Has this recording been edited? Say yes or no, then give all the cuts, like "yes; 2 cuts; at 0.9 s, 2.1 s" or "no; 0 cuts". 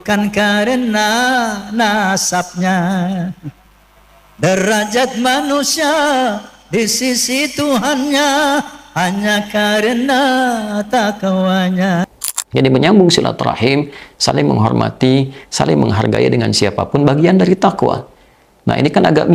no; 0 cuts